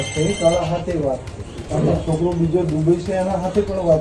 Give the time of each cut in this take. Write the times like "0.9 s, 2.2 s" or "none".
1.6 s